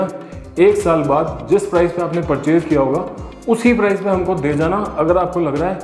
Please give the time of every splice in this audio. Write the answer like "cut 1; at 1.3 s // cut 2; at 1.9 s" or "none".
none